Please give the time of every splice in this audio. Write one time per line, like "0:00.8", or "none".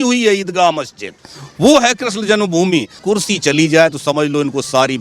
0:03.0